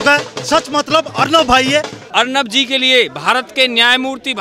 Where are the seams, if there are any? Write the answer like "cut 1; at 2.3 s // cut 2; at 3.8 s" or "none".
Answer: cut 1; at 2.0 s